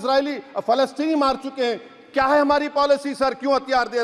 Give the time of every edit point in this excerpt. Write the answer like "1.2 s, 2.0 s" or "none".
none

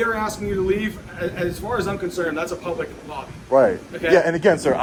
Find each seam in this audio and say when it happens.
none

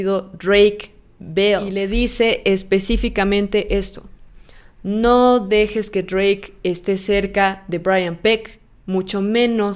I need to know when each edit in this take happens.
1.7 s

